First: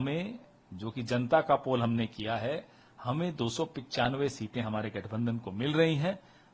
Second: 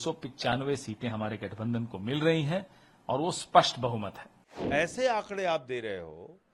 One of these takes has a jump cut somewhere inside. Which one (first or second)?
second